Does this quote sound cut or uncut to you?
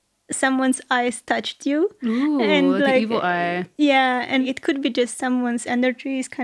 cut